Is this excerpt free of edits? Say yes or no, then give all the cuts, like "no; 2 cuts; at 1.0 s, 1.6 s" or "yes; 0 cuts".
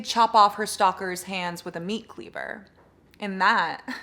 yes; 0 cuts